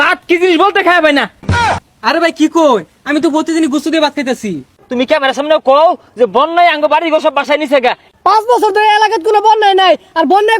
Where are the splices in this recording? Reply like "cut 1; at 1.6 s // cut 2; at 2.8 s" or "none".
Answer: cut 1; at 1.4 s // cut 2; at 4.8 s // cut 3; at 8.1 s